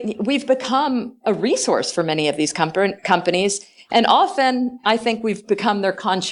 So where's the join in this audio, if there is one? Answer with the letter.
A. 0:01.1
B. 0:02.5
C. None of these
C